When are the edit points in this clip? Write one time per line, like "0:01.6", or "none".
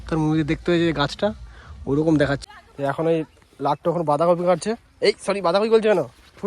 0:02.5